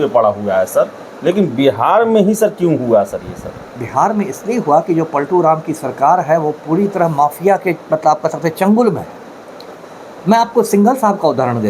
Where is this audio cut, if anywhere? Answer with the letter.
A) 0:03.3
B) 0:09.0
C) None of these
C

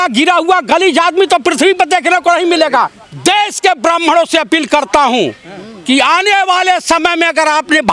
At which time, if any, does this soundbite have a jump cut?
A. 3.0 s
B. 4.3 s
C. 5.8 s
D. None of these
A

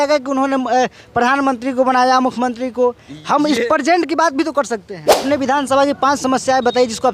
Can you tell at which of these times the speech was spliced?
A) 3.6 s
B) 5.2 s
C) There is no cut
B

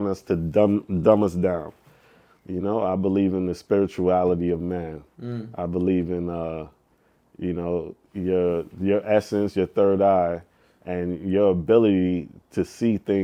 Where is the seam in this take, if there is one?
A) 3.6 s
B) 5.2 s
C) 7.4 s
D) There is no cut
D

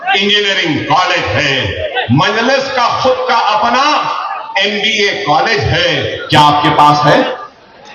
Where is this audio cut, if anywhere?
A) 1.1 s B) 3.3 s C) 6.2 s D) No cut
C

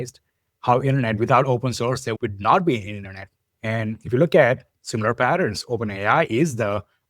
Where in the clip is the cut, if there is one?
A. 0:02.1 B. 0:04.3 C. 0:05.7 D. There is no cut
A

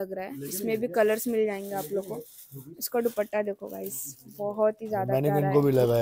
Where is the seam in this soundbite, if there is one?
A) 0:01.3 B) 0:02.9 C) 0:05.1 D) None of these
C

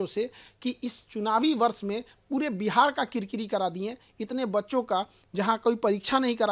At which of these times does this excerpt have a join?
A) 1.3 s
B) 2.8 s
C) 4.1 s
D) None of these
D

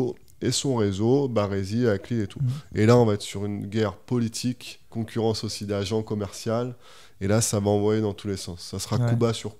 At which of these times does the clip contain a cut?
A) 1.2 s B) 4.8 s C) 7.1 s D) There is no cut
B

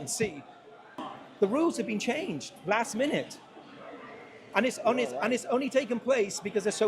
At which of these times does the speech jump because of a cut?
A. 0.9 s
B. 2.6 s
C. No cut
A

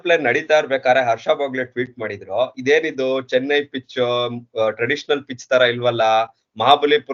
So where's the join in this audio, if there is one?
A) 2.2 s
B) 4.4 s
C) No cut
C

